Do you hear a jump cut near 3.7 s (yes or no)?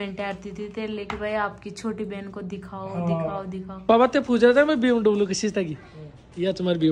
yes